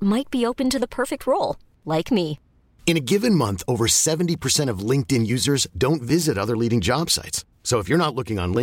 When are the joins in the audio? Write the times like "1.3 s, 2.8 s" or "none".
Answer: none